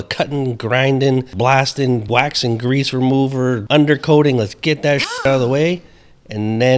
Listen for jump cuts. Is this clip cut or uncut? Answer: cut